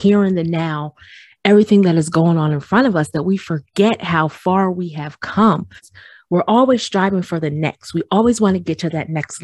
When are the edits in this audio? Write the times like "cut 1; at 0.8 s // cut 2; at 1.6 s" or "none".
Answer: cut 1; at 5.9 s